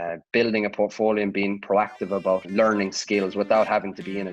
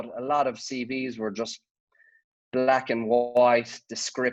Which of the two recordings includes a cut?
first; 1 cut; at 2.5 s

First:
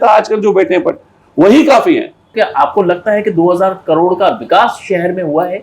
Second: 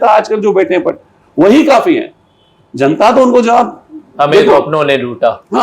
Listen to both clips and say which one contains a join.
first; 1 cut; at 2.2 s

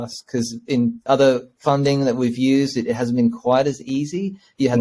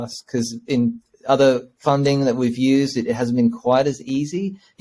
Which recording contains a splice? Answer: first; 1 cut; at 1.0 s

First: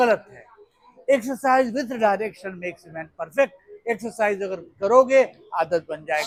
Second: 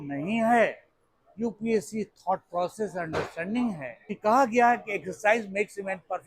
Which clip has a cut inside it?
second; 1 cut; at 4.2 s

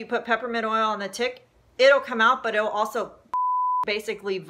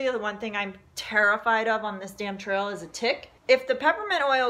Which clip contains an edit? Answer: second; 1 cut; at 3.3 s

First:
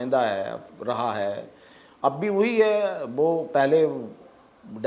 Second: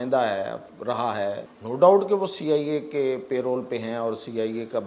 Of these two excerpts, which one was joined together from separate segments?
second; 1 cut; at 1.5 s

